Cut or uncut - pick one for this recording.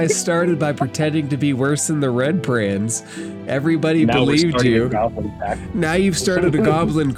uncut